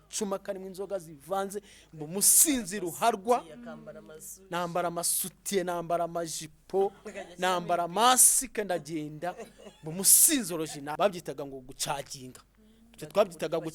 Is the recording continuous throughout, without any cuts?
no; 1 cut; at 11.0 s

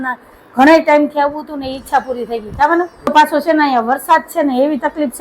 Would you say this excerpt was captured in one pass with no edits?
no; 1 cut; at 3.1 s

